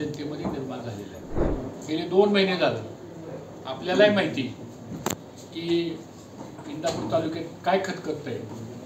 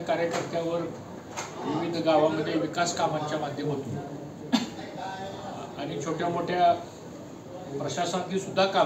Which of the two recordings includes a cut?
first; 1 cut; at 1.5 s

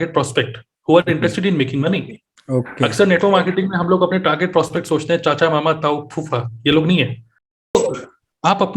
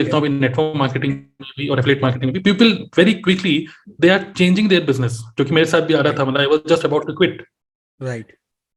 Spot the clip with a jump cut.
first; 1 cut; at 7.7 s

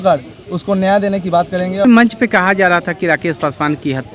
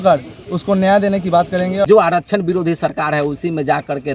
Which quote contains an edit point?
second; 1 cut; at 1.8 s

